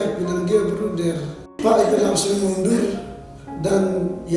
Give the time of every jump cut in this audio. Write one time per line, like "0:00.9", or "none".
0:01.5